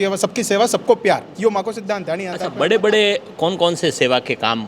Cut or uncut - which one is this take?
cut